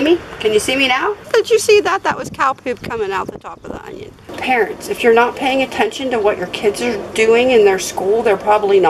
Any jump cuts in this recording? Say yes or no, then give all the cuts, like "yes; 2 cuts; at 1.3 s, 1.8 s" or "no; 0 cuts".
yes; 2 cuts; at 1.2 s, 4.3 s